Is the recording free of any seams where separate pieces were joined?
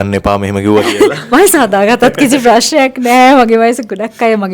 yes; 0 cuts

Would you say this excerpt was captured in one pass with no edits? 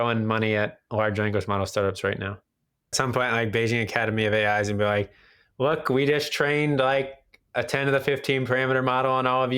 no; 1 cut; at 2.9 s

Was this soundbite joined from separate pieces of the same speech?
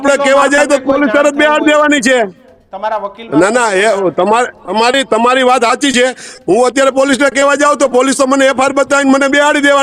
no; 0 cuts

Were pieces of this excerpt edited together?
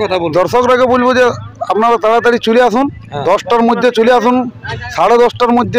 no; 0 cuts

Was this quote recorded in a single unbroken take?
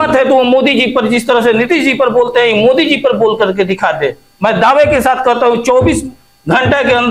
yes; 0 cuts

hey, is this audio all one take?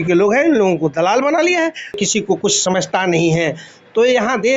no; 1 cut; at 2.0 s

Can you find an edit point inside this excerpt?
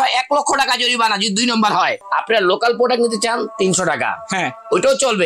yes; 1 cut; at 2.0 s

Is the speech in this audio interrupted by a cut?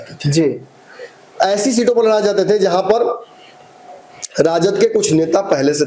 no; 0 cuts

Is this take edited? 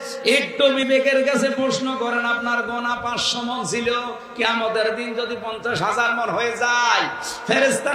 no; 0 cuts

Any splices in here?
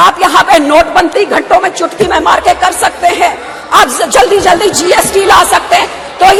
no; 0 cuts

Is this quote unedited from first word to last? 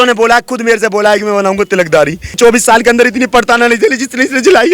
no; 1 cut; at 2.3 s

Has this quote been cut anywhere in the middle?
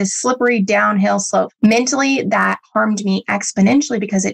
yes; 1 cut; at 1.5 s

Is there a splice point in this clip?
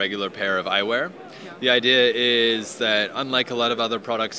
no; 0 cuts

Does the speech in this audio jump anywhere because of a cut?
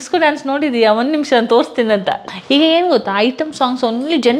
yes; 1 cut; at 2.2 s

